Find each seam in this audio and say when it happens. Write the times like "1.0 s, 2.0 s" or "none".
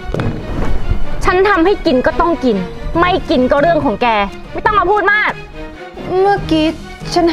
5.9 s